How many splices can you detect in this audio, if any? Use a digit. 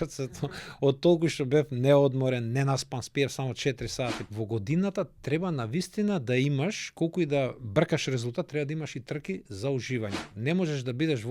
2